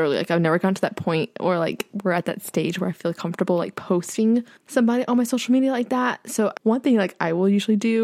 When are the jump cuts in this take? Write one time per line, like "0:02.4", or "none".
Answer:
0:04.6
0:06.6